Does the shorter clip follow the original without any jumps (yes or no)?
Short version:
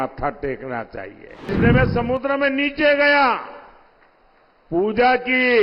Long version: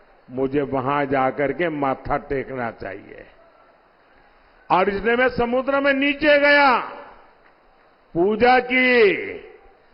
no